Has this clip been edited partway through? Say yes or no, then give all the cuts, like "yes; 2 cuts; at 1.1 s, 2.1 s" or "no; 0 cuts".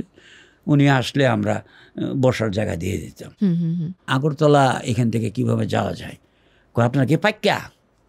yes; 1 cut; at 4.1 s